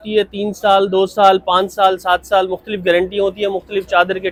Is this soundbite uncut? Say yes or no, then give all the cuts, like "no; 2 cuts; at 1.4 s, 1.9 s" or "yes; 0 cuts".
yes; 0 cuts